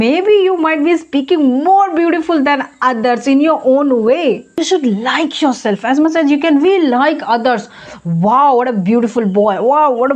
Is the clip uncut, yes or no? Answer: no